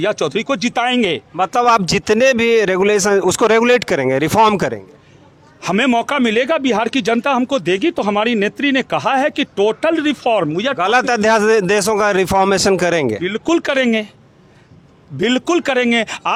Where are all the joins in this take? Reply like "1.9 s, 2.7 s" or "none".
none